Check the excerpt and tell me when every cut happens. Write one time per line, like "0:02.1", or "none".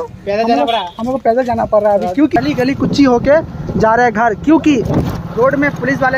0:02.4